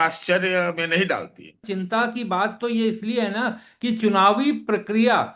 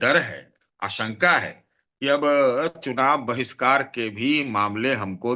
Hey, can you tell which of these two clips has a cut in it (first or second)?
first